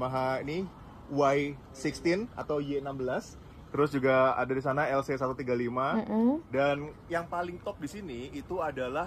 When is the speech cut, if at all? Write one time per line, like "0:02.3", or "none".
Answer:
none